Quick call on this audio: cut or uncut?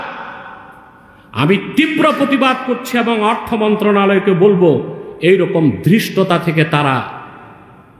uncut